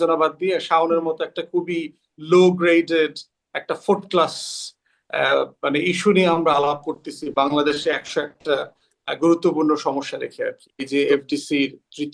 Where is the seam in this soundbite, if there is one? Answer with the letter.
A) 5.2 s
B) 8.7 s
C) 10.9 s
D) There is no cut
C